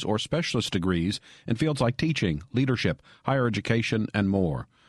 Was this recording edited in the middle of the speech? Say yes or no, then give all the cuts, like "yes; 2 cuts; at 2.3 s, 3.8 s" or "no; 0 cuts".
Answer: no; 0 cuts